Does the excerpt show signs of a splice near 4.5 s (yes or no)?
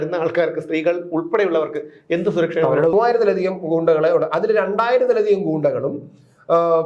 no